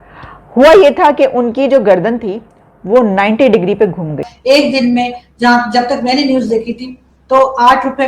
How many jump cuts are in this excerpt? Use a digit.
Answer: 1